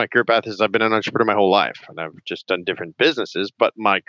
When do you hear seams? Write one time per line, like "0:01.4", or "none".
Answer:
none